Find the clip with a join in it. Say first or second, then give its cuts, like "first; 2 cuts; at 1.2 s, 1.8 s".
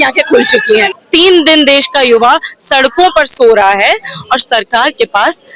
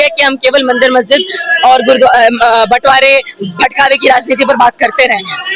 first; 1 cut; at 1.0 s